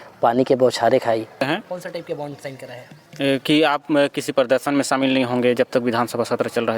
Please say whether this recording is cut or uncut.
cut